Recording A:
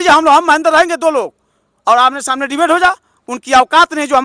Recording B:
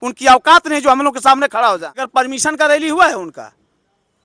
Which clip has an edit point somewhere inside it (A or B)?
B